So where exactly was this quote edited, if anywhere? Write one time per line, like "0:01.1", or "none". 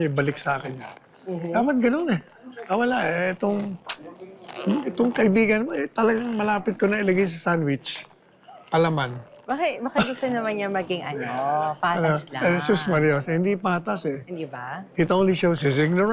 none